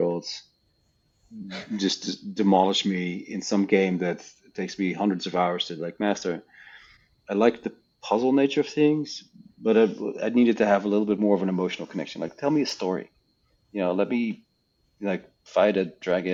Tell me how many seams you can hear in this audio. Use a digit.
0